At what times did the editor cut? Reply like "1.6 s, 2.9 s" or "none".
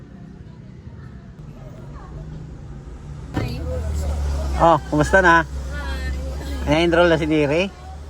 1.4 s, 3.3 s